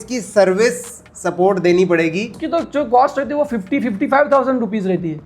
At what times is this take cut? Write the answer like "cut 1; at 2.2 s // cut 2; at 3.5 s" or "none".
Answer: cut 1; at 2.4 s